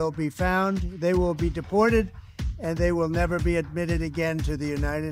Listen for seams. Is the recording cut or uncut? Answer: uncut